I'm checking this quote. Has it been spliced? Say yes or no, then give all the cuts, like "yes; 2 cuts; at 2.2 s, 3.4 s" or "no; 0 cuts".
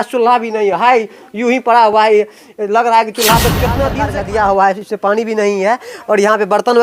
yes; 1 cut; at 3.9 s